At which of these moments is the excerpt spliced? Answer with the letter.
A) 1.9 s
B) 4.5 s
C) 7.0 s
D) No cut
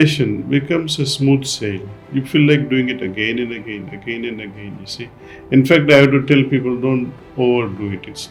D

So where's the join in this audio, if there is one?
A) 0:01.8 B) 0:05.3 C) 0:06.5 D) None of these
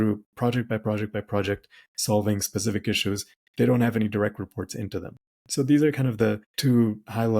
C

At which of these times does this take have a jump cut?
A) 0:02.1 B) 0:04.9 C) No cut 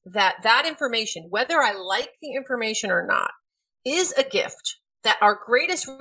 B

